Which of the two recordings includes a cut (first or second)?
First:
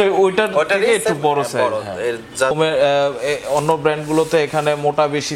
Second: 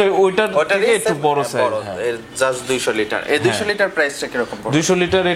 first